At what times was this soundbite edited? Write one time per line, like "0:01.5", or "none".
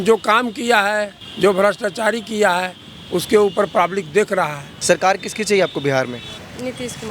0:01.2
0:04.7